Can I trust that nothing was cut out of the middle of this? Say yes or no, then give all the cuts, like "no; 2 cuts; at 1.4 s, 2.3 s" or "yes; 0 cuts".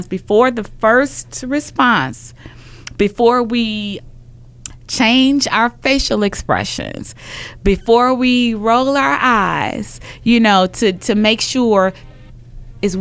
no; 2 cuts; at 3.9 s, 12.1 s